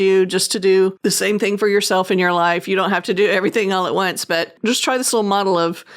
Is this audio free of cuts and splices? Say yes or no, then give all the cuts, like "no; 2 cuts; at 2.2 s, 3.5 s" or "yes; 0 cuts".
no; 2 cuts; at 1.0 s, 4.6 s